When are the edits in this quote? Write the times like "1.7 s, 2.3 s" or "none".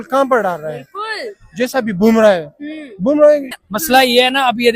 3.5 s